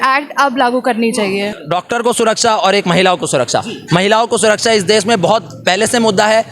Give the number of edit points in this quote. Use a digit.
1